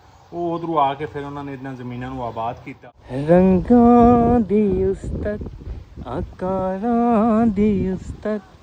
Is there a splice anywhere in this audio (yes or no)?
yes